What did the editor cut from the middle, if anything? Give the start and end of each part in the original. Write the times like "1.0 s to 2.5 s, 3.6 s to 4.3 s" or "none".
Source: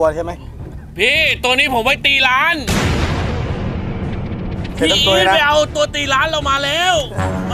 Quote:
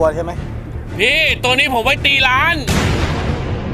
none